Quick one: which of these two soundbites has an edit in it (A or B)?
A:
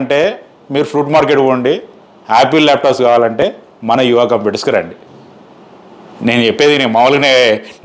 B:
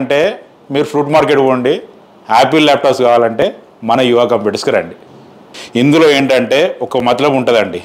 B